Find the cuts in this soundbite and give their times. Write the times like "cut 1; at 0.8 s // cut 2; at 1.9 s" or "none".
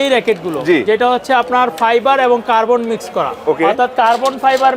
none